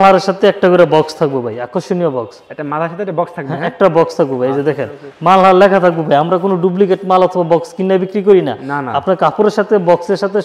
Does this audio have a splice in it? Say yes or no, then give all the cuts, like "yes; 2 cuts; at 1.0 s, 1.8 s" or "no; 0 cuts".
no; 0 cuts